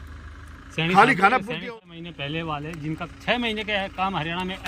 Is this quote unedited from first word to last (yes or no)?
no